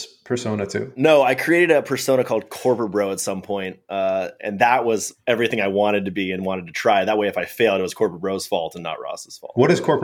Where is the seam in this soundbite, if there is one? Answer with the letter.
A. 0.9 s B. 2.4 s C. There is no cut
A